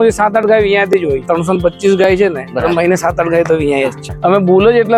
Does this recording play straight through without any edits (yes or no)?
no